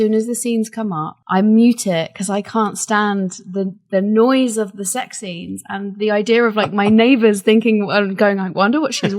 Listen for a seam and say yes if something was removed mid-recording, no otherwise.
yes